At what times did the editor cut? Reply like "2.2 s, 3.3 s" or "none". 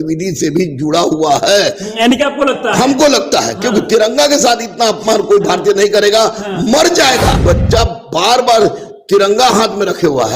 7.4 s